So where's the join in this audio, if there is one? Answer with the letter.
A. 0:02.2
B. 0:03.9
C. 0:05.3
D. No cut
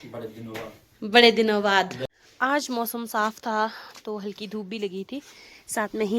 A